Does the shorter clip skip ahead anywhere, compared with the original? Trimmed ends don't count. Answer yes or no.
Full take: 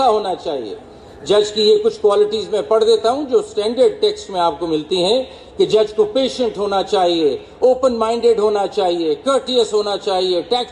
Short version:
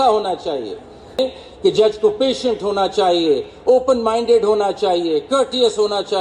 yes